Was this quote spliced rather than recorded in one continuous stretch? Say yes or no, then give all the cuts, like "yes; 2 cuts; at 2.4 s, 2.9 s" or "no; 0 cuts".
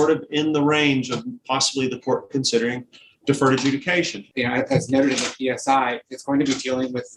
yes; 1 cut; at 4.2 s